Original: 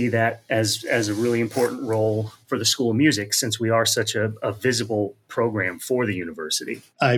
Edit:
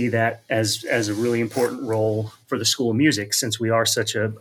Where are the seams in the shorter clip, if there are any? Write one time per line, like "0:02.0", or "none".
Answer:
none